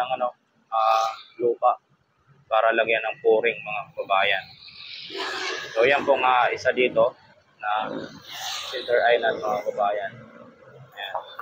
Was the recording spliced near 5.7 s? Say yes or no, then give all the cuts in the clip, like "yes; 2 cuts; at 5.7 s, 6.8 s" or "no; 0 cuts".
no; 0 cuts